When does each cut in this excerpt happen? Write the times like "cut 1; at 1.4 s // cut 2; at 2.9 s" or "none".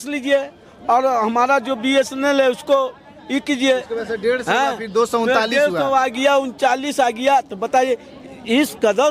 cut 1; at 3.9 s